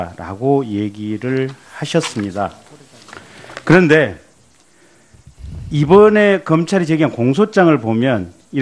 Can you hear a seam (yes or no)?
yes